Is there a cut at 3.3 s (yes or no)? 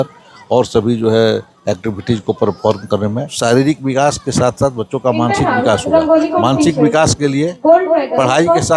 yes